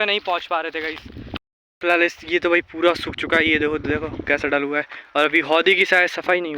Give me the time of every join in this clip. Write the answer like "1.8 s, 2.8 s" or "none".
1.3 s